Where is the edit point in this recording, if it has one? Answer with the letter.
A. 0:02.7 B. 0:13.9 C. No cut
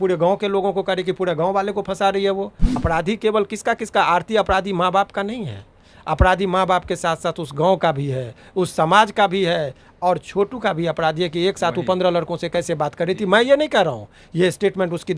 A